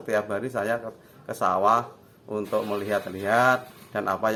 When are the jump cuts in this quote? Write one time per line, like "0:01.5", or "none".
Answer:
none